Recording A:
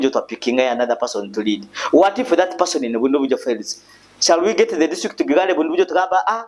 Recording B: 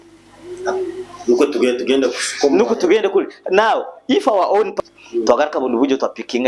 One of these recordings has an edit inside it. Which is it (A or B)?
B